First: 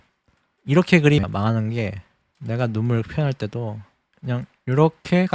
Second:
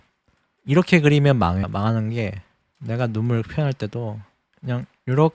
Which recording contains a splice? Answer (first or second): first